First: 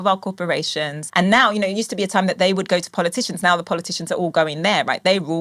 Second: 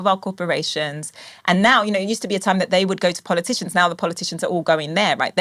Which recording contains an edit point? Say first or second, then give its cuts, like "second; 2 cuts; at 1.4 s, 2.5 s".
first; 1 cut; at 1.0 s